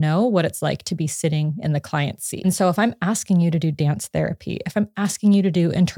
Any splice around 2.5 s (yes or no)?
yes